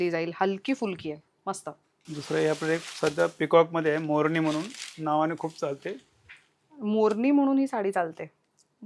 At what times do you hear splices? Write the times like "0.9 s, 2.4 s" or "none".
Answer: none